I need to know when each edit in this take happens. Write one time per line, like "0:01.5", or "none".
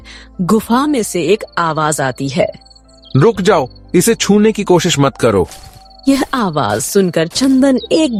none